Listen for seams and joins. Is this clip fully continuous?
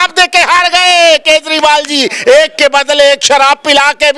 yes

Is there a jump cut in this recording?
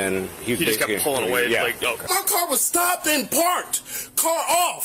yes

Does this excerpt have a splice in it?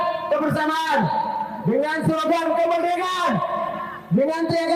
no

